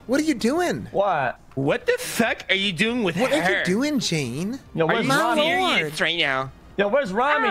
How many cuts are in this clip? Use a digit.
0